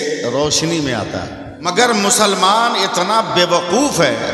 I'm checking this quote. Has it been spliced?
yes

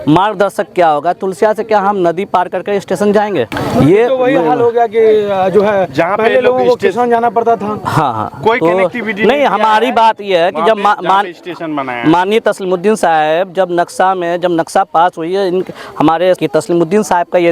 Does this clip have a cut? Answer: no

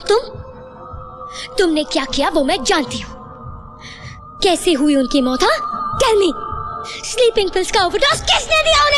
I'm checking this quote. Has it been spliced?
no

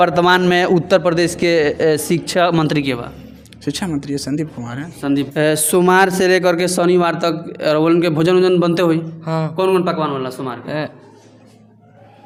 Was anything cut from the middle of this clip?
no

